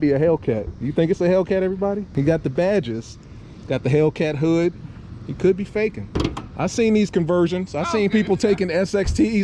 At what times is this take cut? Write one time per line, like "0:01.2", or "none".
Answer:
0:02.1
0:06.2

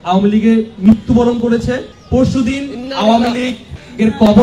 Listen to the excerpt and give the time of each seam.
none

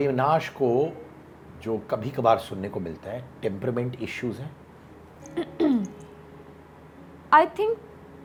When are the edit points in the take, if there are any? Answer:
none

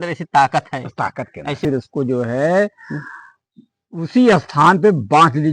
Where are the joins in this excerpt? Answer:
0:01.6

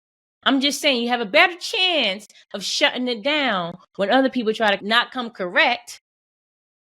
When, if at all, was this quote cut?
0:04.8

